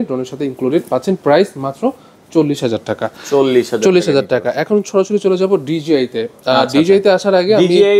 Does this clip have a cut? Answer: no; 0 cuts

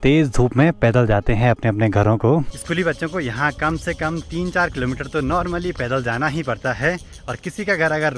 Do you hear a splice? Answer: no; 0 cuts

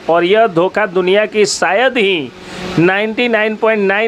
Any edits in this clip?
no; 0 cuts

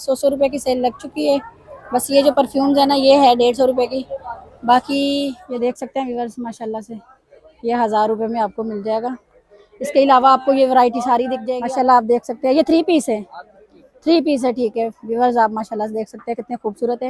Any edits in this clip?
yes; 2 cuts; at 5.4 s, 11.5 s

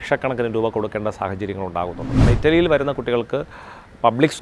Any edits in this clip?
yes; 1 cut; at 2.2 s

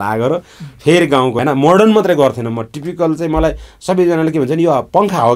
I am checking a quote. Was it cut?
yes; 1 cut; at 1.3 s

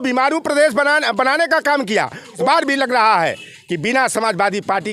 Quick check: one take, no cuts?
no; 1 cut; at 2.4 s

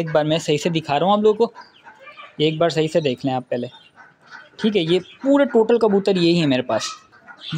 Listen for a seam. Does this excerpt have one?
no; 0 cuts

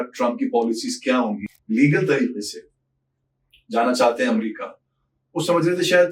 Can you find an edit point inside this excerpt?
yes; 1 cut; at 1.5 s

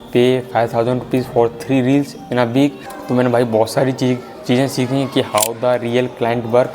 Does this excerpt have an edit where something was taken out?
yes; 1 cut; at 2.9 s

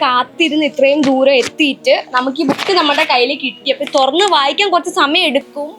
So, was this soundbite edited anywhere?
no; 0 cuts

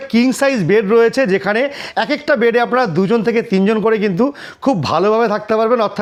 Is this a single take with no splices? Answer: yes; 0 cuts

